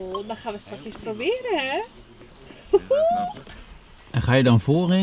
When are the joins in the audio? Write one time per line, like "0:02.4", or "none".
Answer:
none